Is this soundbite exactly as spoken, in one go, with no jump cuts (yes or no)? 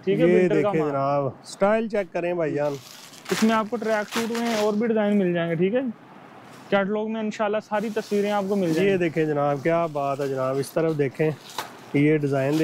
yes